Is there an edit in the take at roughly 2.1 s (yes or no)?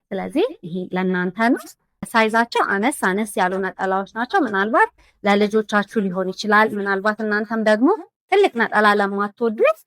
yes